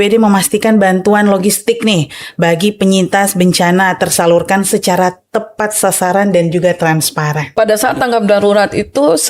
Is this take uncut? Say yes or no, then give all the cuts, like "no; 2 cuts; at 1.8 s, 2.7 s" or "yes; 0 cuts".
no; 1 cut; at 7.5 s